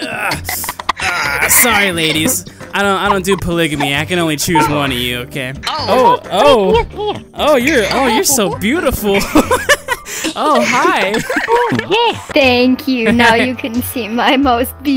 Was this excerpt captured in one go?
no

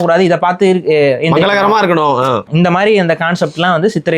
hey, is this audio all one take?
no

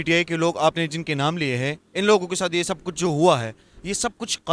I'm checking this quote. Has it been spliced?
no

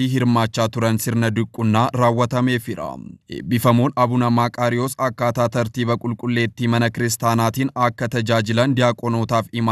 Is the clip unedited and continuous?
yes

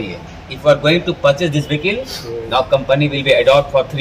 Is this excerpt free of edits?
yes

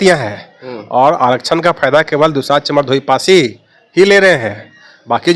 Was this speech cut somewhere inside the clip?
no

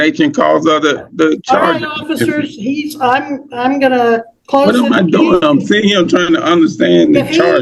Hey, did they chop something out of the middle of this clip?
no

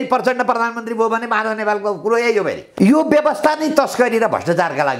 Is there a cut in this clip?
yes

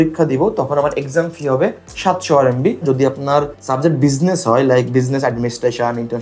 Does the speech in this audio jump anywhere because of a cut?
yes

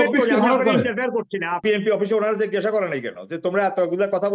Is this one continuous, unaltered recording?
no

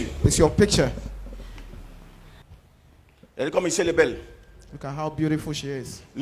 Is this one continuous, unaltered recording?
yes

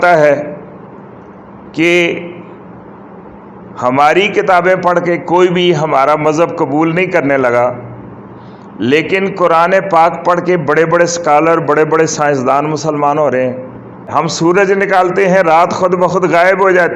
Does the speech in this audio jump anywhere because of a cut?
yes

